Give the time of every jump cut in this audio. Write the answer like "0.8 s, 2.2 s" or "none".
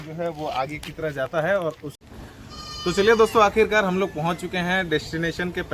2.2 s